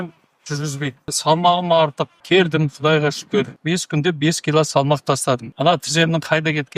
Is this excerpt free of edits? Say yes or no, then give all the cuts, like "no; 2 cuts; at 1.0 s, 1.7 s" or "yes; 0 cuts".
no; 4 cuts; at 1.2 s, 2.2 s, 3.6 s, 5.5 s